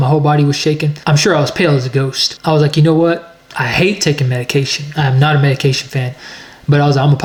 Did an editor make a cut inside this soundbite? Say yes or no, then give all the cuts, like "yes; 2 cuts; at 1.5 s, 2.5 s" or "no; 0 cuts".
no; 0 cuts